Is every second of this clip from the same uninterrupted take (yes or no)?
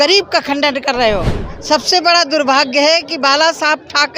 no